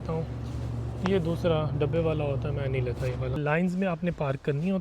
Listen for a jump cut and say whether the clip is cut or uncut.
cut